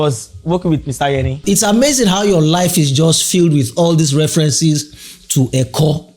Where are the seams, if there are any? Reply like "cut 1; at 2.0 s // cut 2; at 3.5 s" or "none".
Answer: cut 1; at 1.4 s